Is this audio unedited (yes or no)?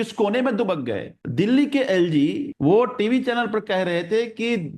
no